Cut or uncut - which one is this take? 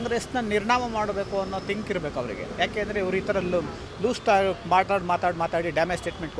uncut